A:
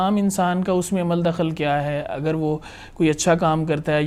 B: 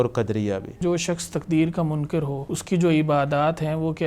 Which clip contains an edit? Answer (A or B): B